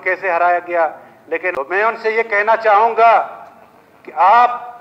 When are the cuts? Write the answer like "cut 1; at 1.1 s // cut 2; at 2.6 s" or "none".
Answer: cut 1; at 1.5 s